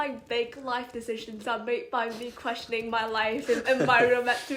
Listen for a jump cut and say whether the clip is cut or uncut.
uncut